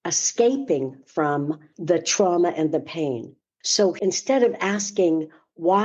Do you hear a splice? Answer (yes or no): yes